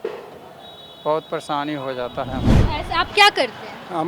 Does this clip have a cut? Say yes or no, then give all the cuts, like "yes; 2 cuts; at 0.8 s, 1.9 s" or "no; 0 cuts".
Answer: yes; 1 cut; at 2.5 s